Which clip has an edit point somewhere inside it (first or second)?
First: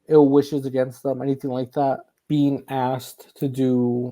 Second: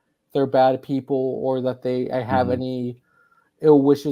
first